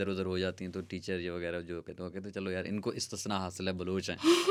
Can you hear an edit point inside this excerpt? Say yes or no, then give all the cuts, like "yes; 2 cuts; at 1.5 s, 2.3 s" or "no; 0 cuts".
no; 0 cuts